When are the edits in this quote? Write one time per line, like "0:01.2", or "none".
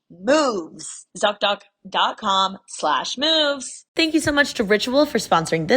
0:03.8

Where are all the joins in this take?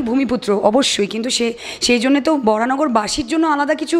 none

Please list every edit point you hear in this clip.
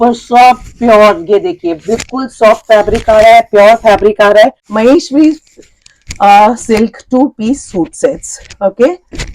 0:04.6

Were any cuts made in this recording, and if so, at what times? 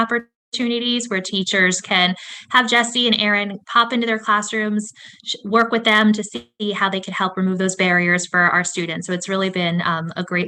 none

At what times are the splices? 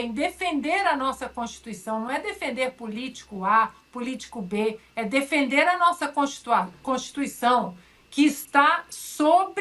none

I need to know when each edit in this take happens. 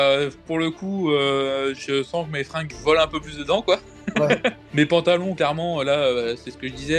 0:02.7
0:04.6

